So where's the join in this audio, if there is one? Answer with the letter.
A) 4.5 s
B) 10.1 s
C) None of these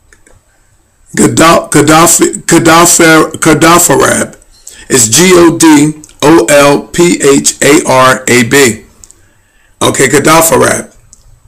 B